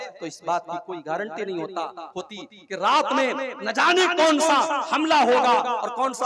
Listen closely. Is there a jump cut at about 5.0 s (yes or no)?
no